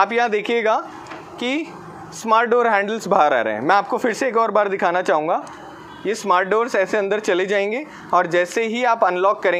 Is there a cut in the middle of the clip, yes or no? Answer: no